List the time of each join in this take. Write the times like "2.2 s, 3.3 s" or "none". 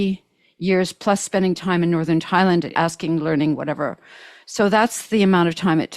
2.7 s